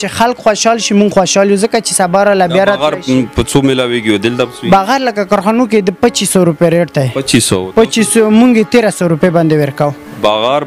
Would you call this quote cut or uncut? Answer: uncut